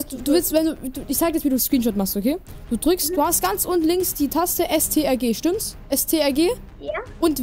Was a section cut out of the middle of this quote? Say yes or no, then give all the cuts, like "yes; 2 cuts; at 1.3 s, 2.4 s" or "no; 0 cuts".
no; 0 cuts